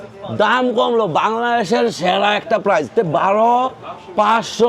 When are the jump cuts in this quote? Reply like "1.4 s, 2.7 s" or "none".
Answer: 2.9 s